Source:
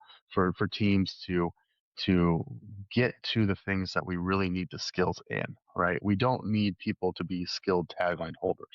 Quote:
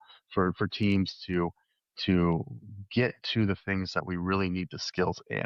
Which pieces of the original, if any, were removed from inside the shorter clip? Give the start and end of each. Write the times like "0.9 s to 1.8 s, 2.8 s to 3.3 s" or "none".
none